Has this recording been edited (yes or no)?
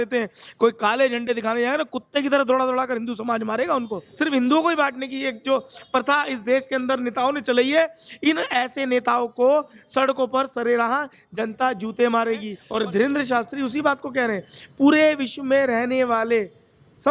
yes